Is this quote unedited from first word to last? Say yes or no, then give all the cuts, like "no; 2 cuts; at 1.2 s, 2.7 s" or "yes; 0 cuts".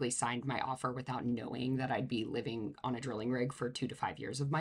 yes; 0 cuts